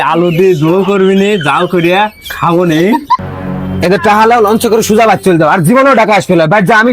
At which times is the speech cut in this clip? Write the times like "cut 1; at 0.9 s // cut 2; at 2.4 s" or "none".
cut 1; at 3.2 s

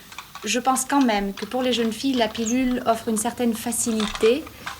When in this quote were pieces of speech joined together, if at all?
none

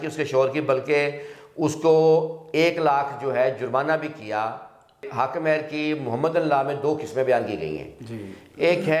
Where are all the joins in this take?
cut 1; at 5.1 s

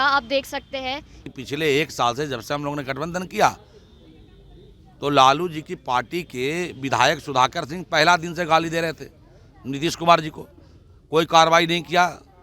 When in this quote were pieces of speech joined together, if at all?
cut 1; at 1.1 s

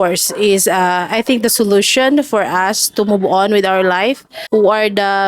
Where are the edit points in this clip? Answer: cut 1; at 4.3 s

